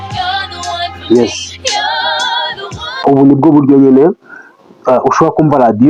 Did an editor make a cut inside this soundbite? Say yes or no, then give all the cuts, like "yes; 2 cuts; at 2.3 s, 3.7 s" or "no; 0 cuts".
yes; 1 cut; at 3.0 s